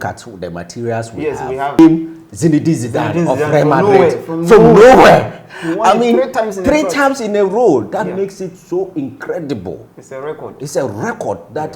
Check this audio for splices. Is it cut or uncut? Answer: cut